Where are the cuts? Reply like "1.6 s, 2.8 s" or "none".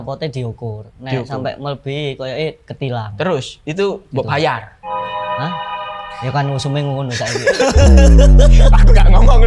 none